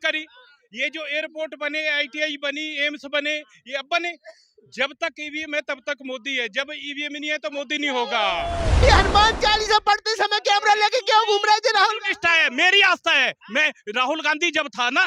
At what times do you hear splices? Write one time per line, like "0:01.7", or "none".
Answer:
0:08.8